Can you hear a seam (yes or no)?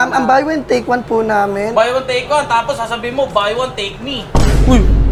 no